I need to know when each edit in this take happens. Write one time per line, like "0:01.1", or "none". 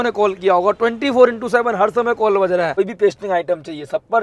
0:02.7